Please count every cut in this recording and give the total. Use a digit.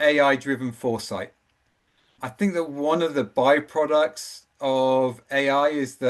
1